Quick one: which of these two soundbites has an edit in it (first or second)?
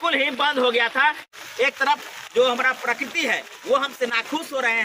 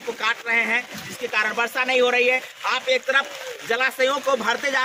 first